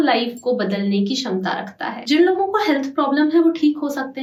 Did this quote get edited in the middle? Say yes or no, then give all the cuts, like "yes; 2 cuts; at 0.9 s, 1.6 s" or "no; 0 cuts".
no; 0 cuts